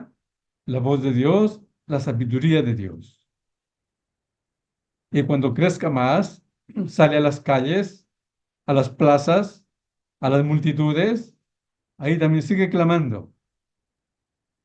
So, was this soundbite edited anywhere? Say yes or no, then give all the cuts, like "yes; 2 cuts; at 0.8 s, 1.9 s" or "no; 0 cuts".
no; 0 cuts